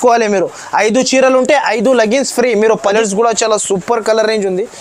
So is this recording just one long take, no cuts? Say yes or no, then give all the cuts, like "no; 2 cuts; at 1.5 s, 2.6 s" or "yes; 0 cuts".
no; 1 cut; at 2.8 s